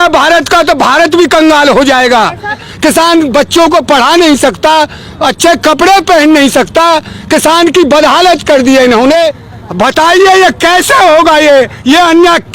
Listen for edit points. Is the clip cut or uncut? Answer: cut